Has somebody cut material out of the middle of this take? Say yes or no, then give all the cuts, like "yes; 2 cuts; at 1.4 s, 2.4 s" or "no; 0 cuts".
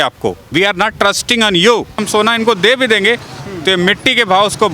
yes; 1 cut; at 2.0 s